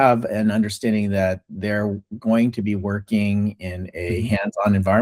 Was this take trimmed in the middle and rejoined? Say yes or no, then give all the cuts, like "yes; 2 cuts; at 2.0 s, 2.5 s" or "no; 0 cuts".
no; 0 cuts